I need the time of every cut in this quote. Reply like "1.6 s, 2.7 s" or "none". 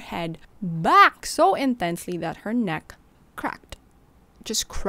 none

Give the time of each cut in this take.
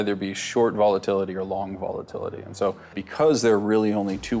3.0 s

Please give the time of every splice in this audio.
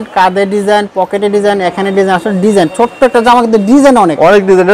none

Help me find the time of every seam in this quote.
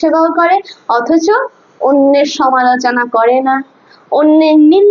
none

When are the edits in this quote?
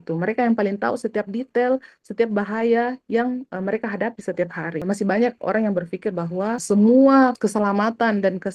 4.8 s, 6.6 s, 7.4 s

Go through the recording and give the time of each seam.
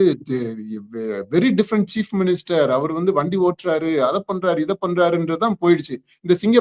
none

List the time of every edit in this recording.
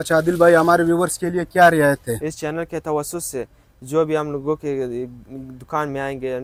none

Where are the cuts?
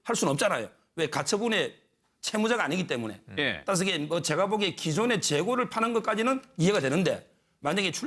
3.1 s

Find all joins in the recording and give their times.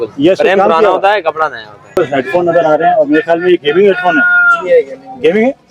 2.0 s

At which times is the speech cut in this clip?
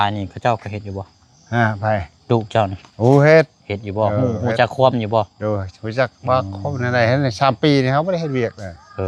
none

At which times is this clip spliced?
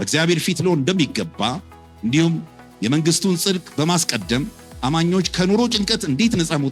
none

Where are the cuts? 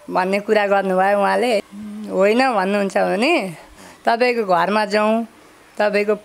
1.7 s

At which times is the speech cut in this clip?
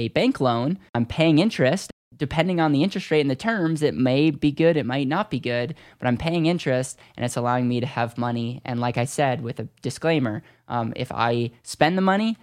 0.9 s, 2.0 s

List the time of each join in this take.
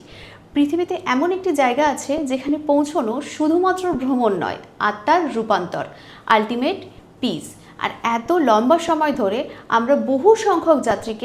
none

